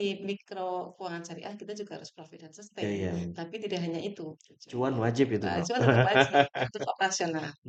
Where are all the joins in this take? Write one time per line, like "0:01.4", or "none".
none